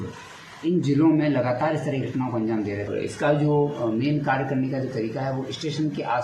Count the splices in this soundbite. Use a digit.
1